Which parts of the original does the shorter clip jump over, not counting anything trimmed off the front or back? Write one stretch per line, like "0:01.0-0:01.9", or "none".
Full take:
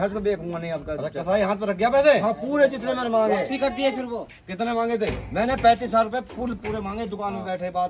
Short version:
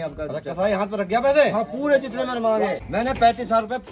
0:03.5-0:05.2